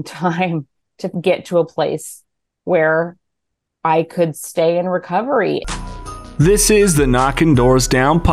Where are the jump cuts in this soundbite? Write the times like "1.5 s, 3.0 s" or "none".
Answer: 5.6 s